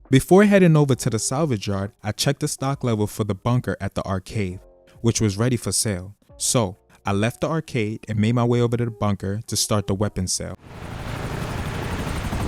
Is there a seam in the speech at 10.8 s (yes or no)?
yes